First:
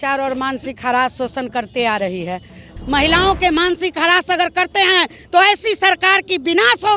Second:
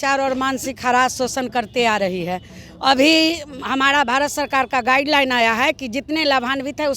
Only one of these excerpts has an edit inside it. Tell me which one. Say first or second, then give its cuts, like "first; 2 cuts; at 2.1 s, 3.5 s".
first; 1 cut; at 2.7 s